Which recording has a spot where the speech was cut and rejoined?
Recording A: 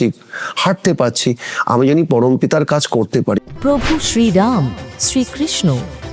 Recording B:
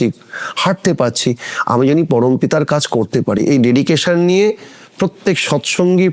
A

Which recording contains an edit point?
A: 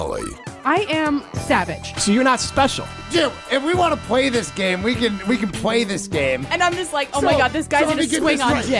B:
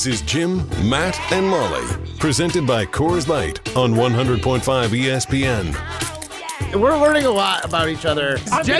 B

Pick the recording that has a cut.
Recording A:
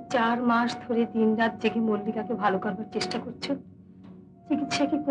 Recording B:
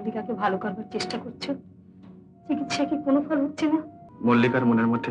B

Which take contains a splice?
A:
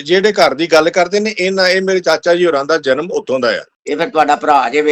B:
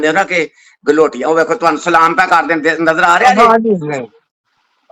A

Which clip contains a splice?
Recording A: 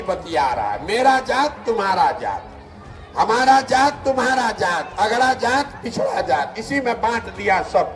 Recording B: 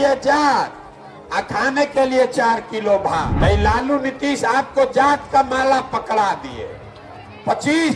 B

